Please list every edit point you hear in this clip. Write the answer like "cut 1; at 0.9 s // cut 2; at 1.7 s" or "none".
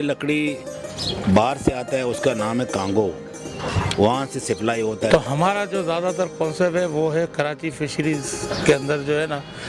cut 1; at 5.1 s